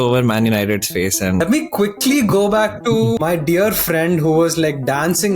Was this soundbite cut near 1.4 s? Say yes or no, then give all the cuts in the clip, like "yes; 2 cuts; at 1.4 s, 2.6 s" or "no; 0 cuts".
yes; 2 cuts; at 1.4 s, 3.2 s